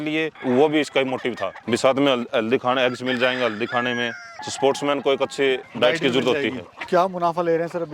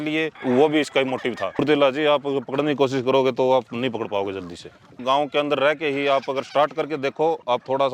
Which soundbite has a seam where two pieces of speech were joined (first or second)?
second